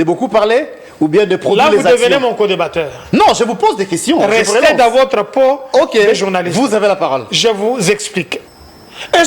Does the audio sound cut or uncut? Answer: cut